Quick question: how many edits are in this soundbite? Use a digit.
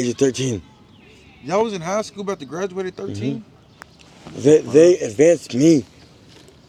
0